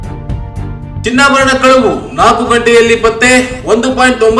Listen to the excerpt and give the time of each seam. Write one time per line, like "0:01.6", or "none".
none